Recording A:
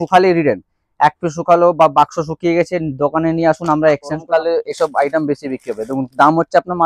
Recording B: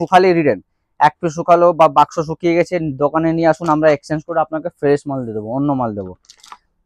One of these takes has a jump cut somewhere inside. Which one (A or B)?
A